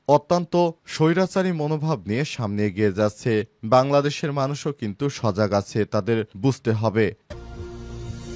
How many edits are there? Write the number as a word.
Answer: one